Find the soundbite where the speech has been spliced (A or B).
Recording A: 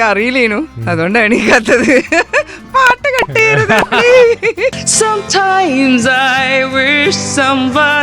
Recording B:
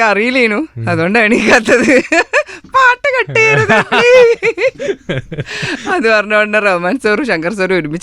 A